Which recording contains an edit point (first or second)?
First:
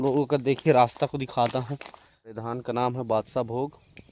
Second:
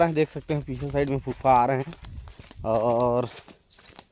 first